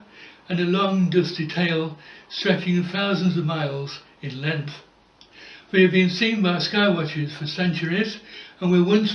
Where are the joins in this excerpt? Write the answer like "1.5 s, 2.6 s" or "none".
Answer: 6.1 s